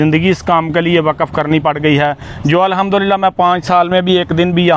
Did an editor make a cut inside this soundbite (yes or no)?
no